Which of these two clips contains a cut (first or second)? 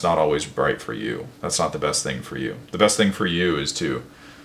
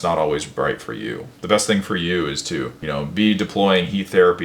second